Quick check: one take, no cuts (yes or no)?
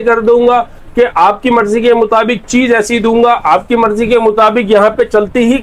yes